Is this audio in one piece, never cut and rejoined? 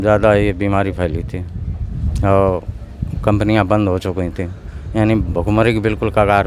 yes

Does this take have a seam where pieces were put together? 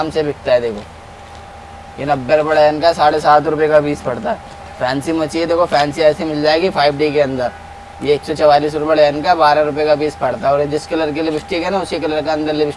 no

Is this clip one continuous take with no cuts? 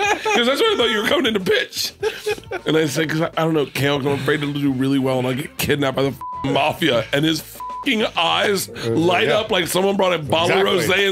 yes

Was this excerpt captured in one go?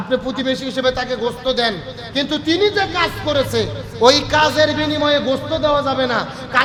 yes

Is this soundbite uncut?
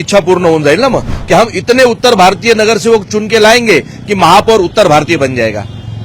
no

